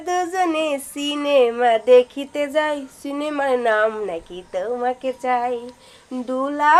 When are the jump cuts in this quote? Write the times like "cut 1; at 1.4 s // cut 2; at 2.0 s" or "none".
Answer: none